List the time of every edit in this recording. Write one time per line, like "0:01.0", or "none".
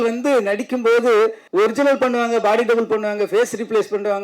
0:01.4